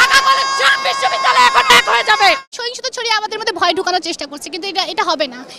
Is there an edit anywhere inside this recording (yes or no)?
yes